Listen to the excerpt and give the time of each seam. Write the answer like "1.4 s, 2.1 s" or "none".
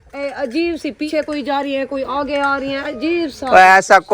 1.1 s